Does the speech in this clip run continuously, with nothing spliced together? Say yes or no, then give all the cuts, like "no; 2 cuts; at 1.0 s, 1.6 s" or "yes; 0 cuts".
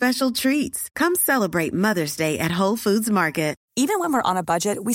yes; 0 cuts